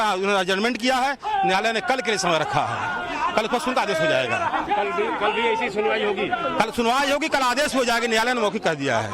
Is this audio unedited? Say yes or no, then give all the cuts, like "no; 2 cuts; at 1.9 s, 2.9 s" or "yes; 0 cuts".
no; 1 cut; at 7.9 s